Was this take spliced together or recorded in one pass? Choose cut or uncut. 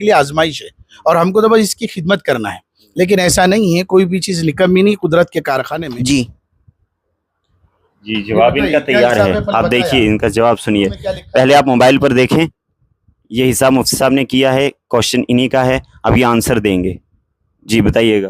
cut